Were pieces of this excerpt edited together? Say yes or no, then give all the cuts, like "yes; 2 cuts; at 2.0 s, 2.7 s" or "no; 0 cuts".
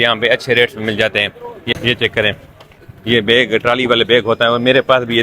yes; 1 cut; at 1.7 s